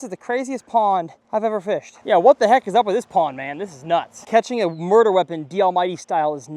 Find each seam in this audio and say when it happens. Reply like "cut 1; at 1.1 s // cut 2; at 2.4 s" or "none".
cut 1; at 1.7 s // cut 2; at 4.2 s